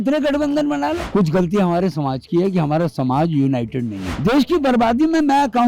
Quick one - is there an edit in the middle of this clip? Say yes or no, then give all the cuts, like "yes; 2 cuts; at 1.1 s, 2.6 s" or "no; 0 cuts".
yes; 2 cuts; at 1.1 s, 4.1 s